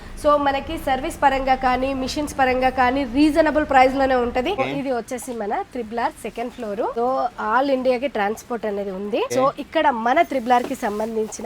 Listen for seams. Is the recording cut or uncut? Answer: cut